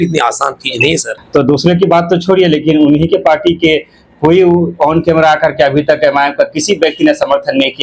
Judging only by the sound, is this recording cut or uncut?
cut